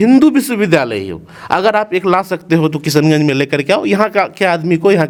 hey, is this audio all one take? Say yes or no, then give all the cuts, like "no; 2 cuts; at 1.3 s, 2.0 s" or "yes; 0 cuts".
yes; 0 cuts